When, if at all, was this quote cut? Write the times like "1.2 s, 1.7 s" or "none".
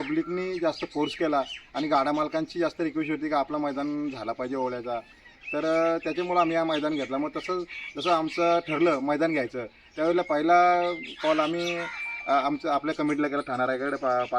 none